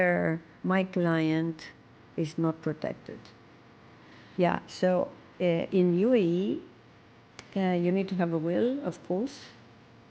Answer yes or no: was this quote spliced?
yes